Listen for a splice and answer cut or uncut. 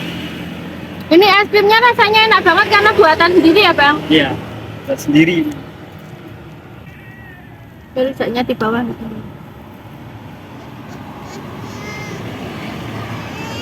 cut